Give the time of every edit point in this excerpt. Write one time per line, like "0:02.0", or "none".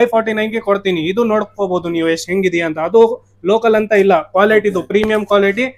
none